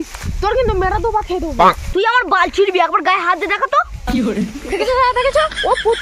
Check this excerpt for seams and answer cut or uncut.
uncut